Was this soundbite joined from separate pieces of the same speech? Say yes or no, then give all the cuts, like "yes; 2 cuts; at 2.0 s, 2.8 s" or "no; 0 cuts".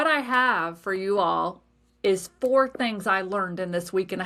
no; 0 cuts